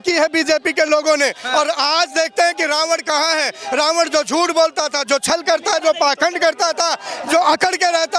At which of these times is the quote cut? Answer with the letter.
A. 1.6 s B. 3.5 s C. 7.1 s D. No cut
D